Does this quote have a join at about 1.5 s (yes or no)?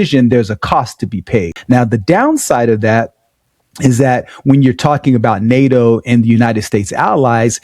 yes